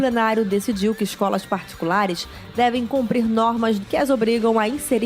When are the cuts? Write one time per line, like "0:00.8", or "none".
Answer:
0:03.8